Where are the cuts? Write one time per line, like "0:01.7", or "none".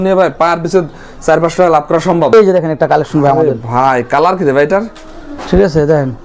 0:02.3